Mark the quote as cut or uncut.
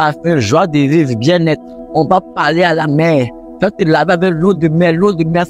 uncut